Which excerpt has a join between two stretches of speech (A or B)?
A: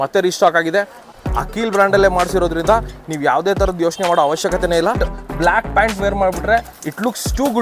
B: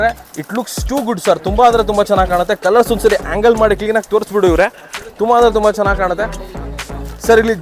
A